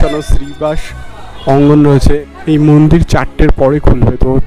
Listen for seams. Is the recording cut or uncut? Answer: cut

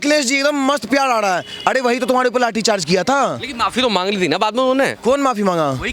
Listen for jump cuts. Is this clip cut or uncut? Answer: uncut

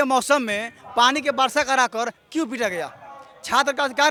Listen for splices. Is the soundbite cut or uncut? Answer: uncut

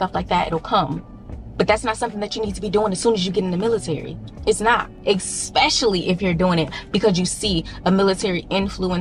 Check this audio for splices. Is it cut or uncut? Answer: uncut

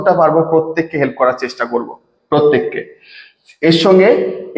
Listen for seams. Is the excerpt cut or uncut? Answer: uncut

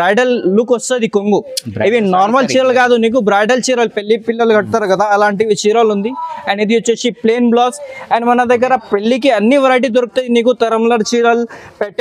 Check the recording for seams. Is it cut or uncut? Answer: uncut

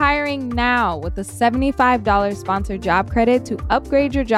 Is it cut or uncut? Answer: uncut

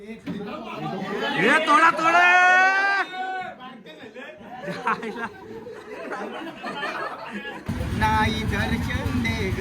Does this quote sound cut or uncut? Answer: cut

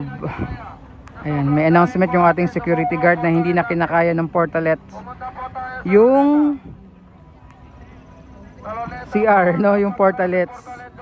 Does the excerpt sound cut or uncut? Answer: uncut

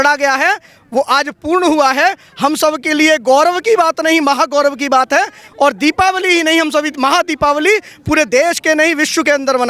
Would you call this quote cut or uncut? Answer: uncut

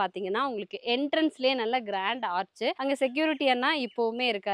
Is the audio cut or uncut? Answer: cut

